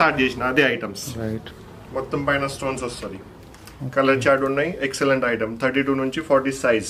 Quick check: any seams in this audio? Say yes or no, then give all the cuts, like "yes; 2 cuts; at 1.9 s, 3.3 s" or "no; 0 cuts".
yes; 1 cut; at 1.4 s